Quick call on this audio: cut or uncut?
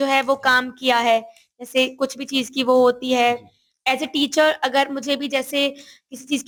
uncut